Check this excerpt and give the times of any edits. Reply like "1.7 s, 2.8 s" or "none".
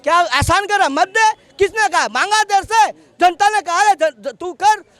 none